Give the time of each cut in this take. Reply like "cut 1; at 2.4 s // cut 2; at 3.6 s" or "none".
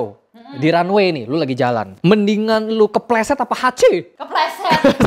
none